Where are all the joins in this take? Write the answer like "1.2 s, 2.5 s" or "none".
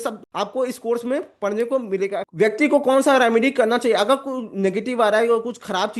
2.3 s